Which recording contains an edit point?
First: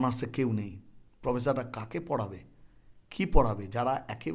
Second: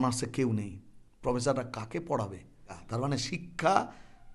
second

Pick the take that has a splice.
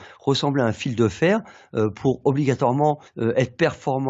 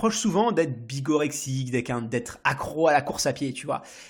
first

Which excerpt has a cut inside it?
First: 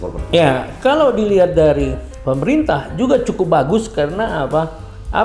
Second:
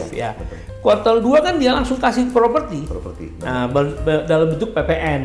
first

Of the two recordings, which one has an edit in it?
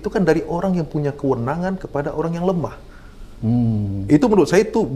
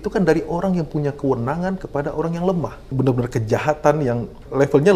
second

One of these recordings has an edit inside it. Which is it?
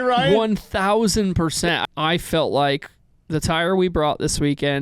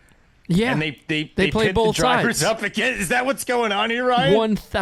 first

